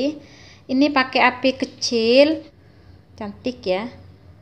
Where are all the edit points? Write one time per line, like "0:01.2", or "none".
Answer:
0:02.6